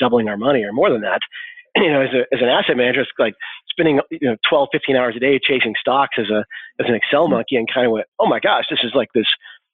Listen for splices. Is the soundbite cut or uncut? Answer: cut